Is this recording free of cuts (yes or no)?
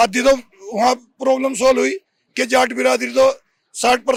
yes